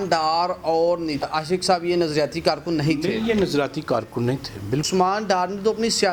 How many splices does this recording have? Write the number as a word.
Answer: two